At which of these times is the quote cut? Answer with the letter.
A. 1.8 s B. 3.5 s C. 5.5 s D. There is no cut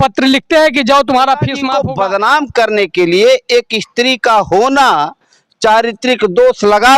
A